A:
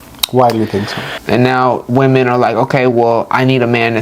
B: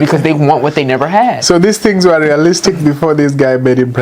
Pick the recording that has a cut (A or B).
A